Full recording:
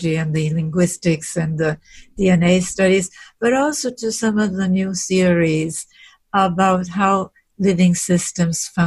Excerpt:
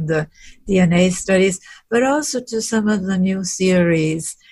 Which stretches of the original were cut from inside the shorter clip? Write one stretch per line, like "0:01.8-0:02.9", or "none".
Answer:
none